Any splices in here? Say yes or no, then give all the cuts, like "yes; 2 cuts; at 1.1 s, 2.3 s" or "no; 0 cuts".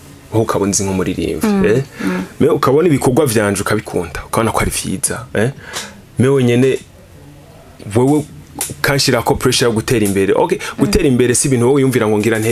no; 0 cuts